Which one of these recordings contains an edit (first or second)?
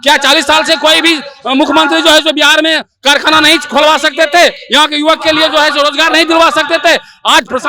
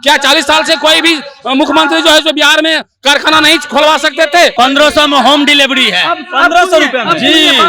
second